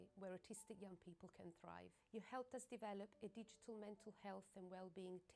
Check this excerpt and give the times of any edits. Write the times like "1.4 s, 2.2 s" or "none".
2.9 s